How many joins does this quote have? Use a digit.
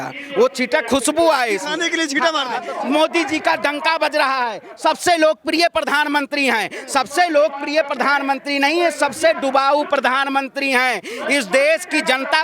1